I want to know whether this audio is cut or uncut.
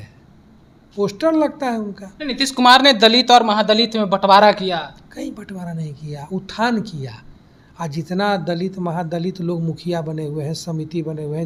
uncut